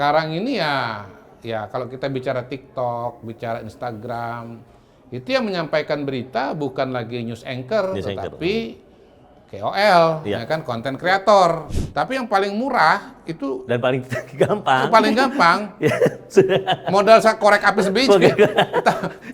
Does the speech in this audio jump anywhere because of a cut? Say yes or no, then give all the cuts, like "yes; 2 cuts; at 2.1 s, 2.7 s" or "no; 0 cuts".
yes; 1 cut; at 11.8 s